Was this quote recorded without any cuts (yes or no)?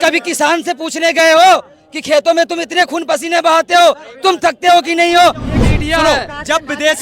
no